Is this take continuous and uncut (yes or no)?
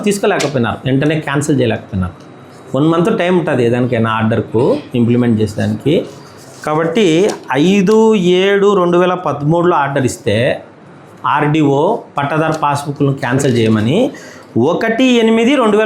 yes